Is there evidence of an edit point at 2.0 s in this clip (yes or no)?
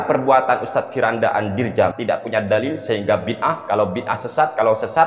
yes